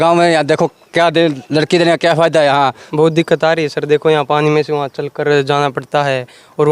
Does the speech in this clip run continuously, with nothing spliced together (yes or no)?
no